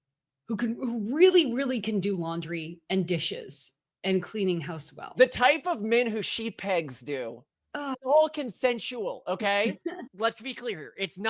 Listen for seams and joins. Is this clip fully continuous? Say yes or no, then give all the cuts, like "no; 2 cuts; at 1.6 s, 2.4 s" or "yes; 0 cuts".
no; 2 cuts; at 8.0 s, 10.0 s